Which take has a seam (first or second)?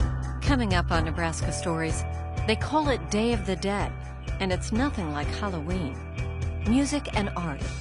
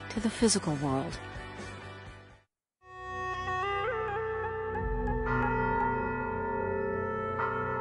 second